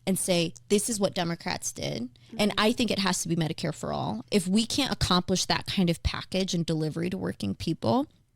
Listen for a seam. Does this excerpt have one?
yes; 1 cut; at 4.2 s

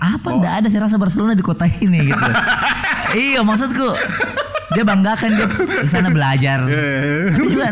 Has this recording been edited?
no; 0 cuts

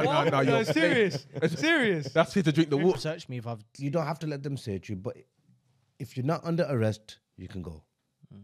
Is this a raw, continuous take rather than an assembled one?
no; 1 cut; at 2.9 s

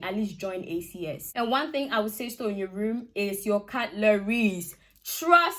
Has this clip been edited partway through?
yes; 1 cut; at 1.2 s

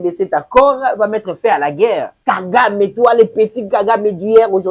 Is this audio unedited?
no; 1 cut; at 2.1 s

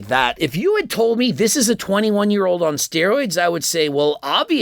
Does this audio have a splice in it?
no; 0 cuts

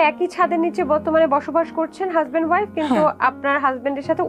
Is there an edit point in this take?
no; 0 cuts

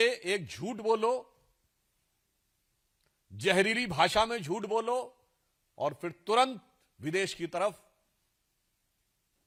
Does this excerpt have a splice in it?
no; 0 cuts

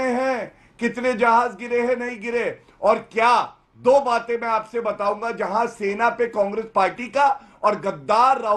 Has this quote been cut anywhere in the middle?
no; 0 cuts

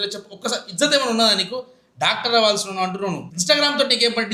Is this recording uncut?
yes; 0 cuts

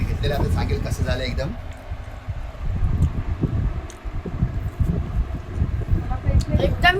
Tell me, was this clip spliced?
no; 0 cuts

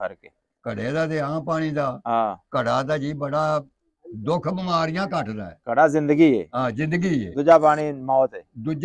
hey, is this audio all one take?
yes; 0 cuts

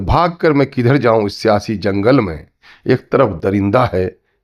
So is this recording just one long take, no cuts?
yes; 0 cuts

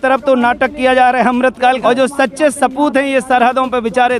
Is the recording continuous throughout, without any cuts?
no; 1 cut; at 1.8 s

